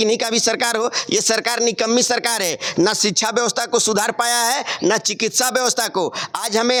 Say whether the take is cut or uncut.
uncut